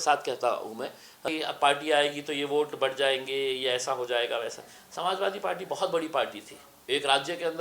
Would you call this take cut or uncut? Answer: cut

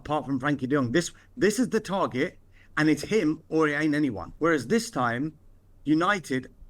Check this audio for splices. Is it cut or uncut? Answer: cut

